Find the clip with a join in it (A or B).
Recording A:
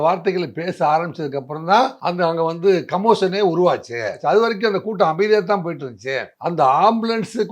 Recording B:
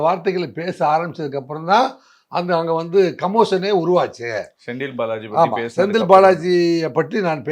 A